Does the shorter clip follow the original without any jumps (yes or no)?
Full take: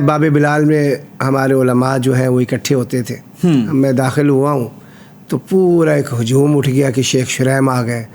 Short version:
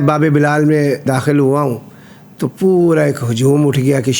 no